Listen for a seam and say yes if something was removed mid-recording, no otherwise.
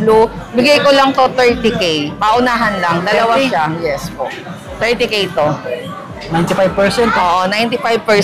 no